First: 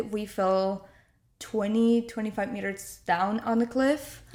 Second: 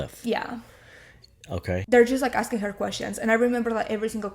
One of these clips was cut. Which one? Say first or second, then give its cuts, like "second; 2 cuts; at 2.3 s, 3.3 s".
second; 1 cut; at 1.8 s